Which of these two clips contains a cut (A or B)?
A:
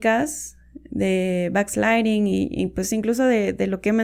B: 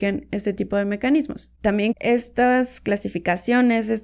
B